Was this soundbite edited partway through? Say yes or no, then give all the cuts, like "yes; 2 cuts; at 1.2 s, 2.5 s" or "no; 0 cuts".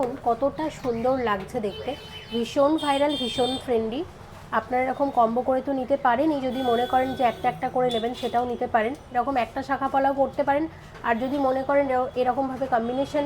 no; 0 cuts